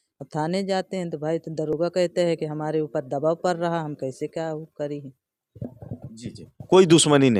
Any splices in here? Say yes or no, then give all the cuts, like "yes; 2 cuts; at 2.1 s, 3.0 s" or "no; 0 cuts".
no; 0 cuts